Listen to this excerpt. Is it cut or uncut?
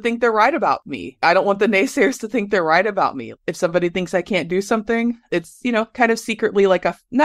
cut